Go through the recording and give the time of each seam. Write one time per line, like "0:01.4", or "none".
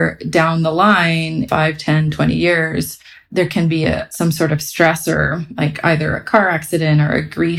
0:01.5
0:03.3
0:04.1